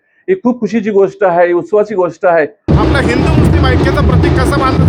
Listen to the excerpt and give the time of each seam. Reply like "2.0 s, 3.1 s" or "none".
2.6 s